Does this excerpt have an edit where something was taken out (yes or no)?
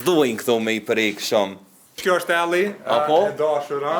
yes